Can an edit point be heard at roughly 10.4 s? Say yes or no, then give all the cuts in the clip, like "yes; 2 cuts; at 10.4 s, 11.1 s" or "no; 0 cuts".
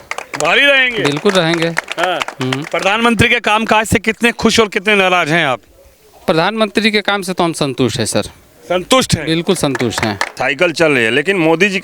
yes; 1 cut; at 10.4 s